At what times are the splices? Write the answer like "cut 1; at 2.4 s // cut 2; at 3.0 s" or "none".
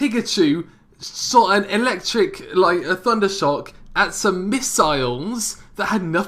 cut 1; at 4.4 s